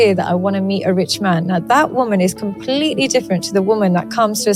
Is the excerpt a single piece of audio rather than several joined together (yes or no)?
yes